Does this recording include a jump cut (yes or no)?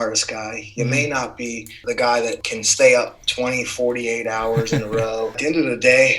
yes